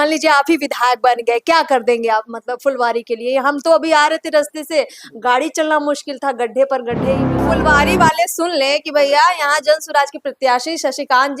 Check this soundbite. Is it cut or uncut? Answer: cut